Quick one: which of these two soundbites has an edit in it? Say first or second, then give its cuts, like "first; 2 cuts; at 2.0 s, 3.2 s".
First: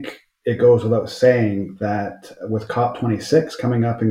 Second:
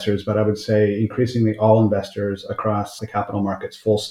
second; 1 cut; at 3.0 s